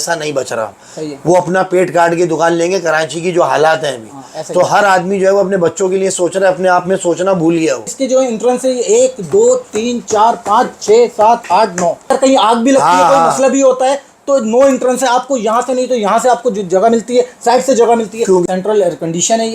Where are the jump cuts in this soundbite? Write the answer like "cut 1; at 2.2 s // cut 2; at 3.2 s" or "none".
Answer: cut 1; at 7.9 s // cut 2; at 12.0 s // cut 3; at 18.4 s